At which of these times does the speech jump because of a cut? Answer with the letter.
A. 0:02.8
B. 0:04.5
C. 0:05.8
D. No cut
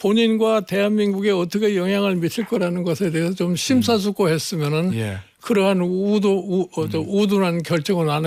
D